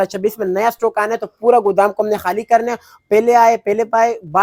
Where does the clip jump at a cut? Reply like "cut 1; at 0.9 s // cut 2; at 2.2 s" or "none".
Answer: none